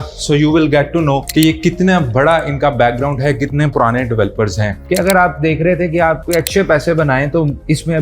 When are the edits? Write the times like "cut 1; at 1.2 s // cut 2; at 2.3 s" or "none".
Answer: cut 1; at 4.8 s // cut 2; at 6.2 s